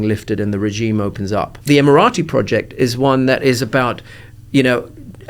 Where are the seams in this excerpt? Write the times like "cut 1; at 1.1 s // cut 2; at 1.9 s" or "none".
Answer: cut 1; at 1.5 s